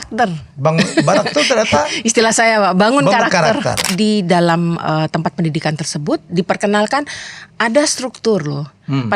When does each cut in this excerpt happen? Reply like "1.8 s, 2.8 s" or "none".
3.8 s

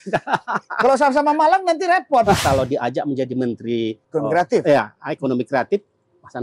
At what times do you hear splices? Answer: 2.4 s

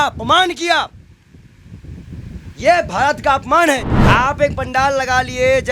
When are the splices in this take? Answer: 3.9 s

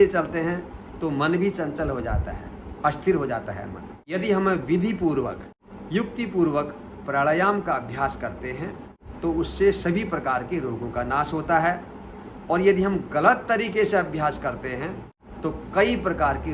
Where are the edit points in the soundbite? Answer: 4.1 s

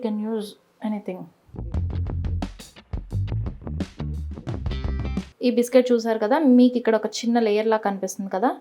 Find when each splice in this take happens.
5.3 s

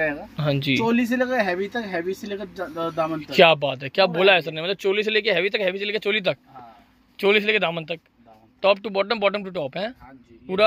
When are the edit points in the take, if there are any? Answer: none

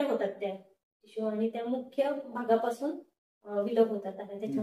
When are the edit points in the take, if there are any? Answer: none

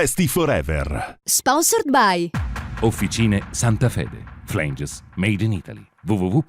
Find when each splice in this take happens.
1.2 s

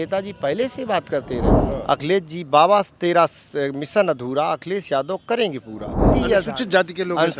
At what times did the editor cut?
1.6 s, 6.1 s

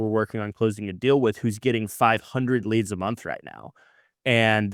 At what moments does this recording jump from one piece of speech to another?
none

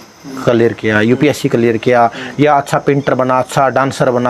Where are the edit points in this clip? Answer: none

